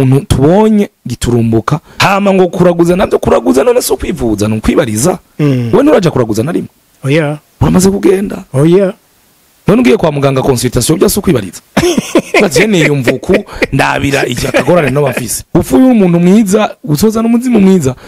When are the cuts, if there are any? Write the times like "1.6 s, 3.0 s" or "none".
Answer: 1.8 s, 11.6 s, 15.3 s